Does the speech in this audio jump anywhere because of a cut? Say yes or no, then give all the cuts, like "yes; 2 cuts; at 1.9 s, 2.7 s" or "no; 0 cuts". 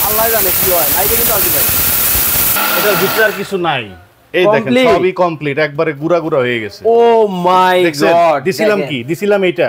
yes; 1 cut; at 2.6 s